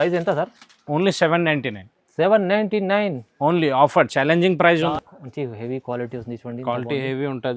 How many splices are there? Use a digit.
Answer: 1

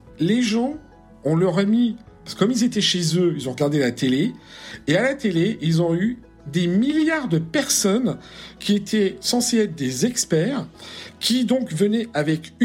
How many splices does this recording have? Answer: 0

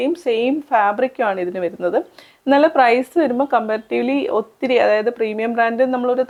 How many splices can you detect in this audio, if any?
0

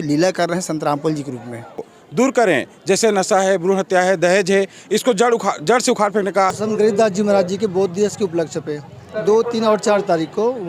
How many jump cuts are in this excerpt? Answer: 2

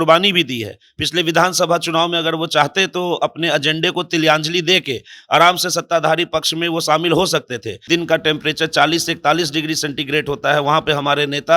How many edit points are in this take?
1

